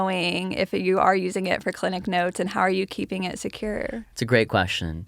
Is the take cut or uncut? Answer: uncut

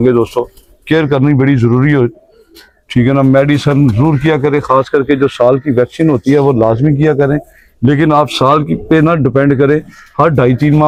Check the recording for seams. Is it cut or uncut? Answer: uncut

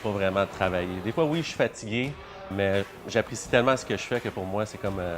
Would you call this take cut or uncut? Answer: cut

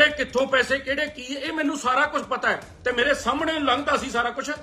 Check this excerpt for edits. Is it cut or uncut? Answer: uncut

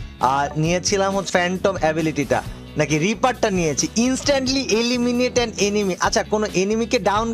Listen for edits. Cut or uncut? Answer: cut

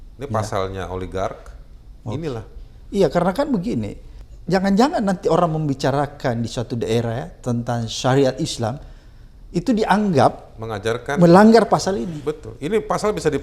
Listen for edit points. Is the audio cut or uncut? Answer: uncut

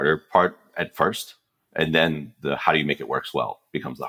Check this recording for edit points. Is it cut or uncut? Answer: uncut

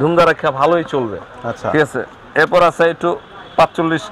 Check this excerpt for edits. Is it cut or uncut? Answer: uncut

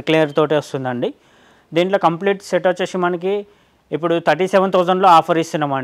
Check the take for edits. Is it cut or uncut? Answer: uncut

